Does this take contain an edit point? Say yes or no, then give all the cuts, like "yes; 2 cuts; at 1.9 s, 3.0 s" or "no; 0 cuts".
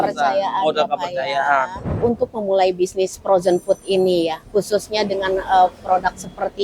yes; 1 cut; at 2.0 s